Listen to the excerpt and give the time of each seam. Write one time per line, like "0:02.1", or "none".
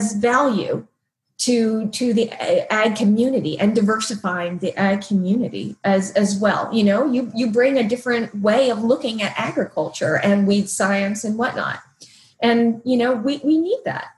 none